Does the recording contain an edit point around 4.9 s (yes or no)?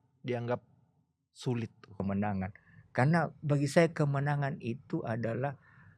no